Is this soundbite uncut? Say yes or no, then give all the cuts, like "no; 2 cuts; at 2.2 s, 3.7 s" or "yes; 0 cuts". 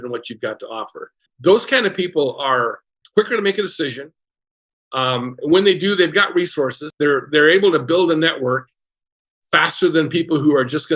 no; 3 cuts; at 1.3 s, 2.9 s, 6.8 s